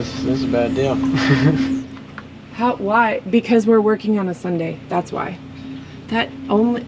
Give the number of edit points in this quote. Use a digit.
1